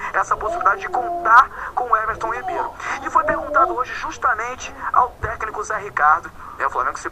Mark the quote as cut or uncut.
cut